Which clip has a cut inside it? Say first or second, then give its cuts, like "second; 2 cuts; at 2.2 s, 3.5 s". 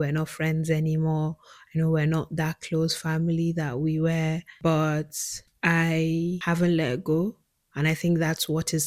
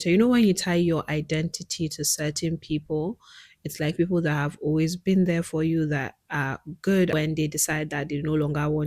second; 1 cut; at 7.1 s